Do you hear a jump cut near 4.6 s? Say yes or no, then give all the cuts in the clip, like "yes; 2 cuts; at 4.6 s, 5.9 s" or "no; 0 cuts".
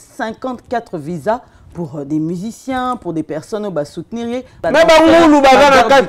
yes; 1 cut; at 4.6 s